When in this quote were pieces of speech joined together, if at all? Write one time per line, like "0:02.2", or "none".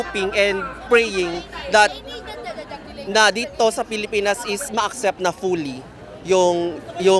none